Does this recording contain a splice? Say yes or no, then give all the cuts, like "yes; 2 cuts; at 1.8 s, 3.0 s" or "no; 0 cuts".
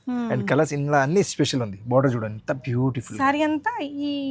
no; 0 cuts